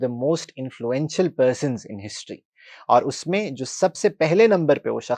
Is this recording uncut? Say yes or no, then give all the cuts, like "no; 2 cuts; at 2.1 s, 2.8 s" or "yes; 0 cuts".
yes; 0 cuts